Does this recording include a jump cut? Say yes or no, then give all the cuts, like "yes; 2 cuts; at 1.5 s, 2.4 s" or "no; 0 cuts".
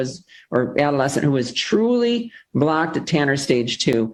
no; 0 cuts